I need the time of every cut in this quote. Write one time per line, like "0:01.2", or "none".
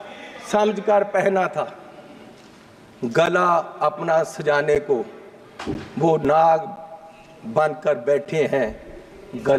none